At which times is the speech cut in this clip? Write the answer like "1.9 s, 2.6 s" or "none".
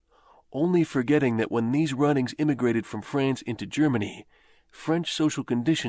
1.9 s